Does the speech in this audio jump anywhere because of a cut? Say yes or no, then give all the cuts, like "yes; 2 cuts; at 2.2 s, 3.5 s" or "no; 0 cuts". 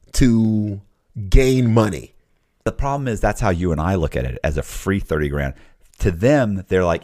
yes; 1 cut; at 2.6 s